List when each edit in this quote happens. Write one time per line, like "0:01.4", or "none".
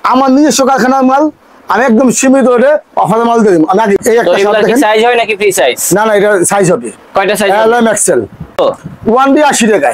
0:04.0
0:08.5

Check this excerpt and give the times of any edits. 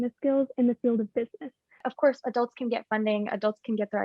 0:01.9

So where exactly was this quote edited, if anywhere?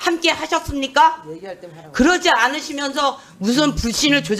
none

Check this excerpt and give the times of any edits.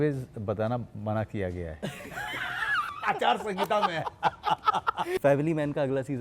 0:05.2

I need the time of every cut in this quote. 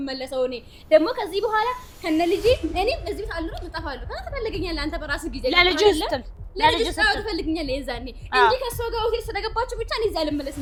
none

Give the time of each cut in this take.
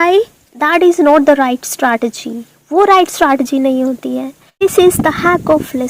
0:04.5

